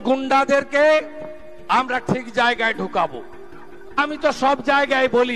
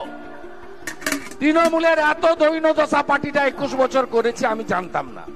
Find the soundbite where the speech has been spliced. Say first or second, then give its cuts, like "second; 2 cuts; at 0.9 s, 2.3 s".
first; 1 cut; at 4.0 s